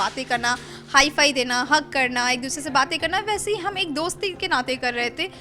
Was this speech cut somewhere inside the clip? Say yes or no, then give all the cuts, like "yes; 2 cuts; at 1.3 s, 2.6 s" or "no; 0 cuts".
no; 0 cuts